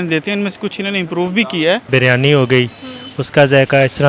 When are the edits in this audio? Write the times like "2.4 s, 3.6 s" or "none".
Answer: 1.9 s

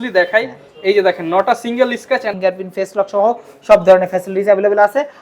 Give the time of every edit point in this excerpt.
2.3 s

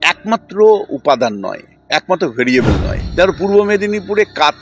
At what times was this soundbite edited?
2.9 s

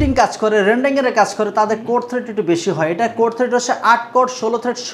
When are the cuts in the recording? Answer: none

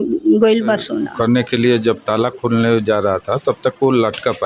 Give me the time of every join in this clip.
1.1 s

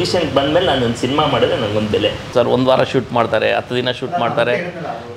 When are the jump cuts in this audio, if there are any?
2.3 s

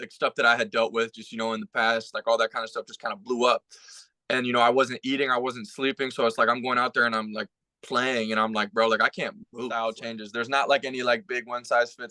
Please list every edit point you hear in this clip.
9.8 s

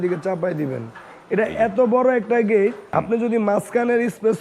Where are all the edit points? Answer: 2.8 s

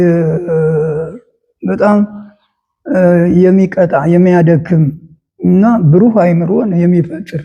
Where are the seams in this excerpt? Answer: none

